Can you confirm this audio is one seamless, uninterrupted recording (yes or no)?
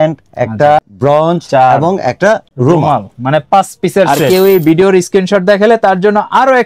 no